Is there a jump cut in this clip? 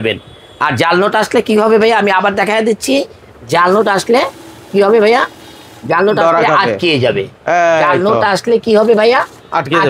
no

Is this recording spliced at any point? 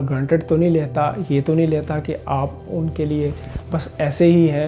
no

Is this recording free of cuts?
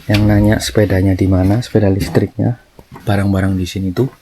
no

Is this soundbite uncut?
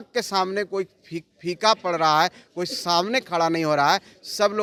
yes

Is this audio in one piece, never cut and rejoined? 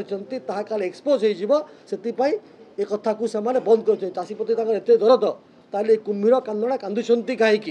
yes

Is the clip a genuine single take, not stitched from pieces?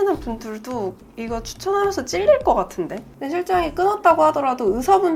yes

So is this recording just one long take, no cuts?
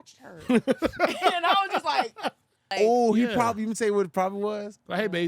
no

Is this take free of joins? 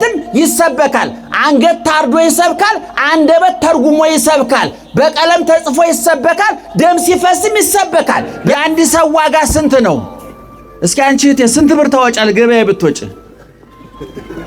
no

